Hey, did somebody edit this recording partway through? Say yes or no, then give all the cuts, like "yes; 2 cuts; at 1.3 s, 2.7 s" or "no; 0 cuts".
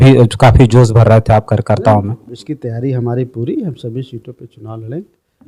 no; 0 cuts